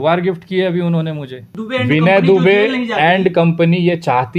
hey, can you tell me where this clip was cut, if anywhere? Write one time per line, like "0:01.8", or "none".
0:01.5